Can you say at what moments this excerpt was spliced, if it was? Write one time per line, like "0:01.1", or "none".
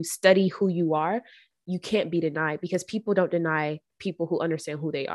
none